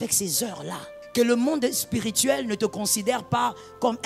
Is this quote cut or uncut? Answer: cut